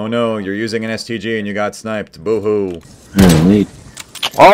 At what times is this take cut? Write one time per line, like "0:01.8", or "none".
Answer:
none